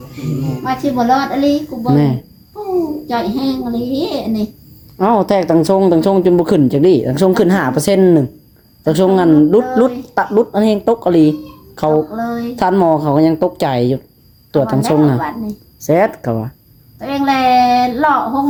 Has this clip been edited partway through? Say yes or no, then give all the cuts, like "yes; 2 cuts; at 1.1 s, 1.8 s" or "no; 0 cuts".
no; 0 cuts